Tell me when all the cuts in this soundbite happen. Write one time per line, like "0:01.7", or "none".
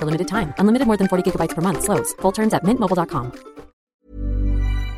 0:03.8